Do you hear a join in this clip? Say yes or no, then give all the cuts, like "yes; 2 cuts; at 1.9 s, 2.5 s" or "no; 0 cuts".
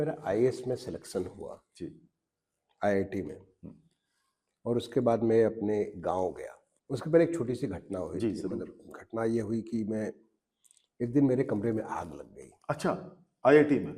no; 0 cuts